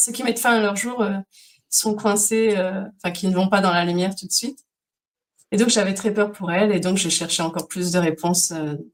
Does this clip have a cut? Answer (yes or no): no